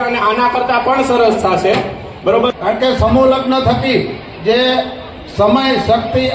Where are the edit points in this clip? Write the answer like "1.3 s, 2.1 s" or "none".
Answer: 2.5 s